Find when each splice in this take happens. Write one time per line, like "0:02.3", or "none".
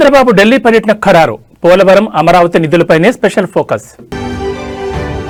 none